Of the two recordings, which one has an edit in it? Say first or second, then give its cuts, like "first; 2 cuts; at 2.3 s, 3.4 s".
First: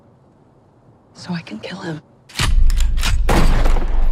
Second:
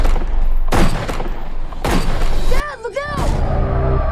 second; 1 cut; at 2.4 s